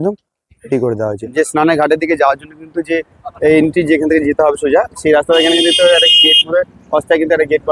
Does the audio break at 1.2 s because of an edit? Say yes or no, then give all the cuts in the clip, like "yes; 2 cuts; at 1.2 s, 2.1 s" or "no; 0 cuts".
yes; 1 cut; at 1.2 s